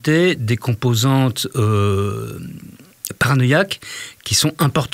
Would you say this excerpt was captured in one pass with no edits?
yes; 0 cuts

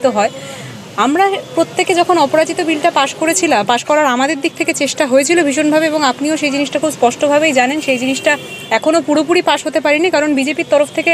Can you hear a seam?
no; 0 cuts

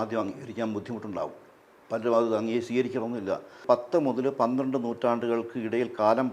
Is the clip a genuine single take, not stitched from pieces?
no; 1 cut; at 3.6 s

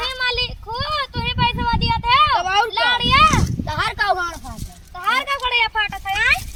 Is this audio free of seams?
yes; 0 cuts

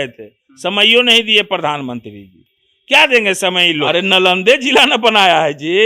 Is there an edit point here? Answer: no; 0 cuts

